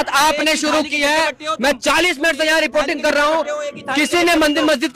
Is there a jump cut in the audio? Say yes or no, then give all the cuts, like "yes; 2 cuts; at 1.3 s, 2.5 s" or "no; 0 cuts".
no; 0 cuts